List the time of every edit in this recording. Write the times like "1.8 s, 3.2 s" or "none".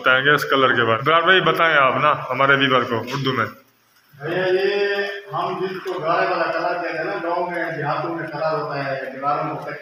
1.0 s